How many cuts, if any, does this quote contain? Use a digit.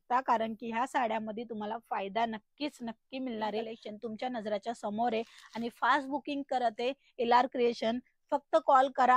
1